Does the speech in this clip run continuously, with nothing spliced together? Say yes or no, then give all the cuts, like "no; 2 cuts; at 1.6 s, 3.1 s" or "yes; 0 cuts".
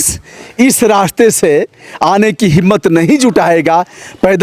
yes; 0 cuts